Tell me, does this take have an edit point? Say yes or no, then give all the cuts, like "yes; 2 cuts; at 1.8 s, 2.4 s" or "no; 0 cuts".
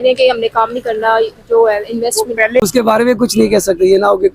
yes; 1 cut; at 2.6 s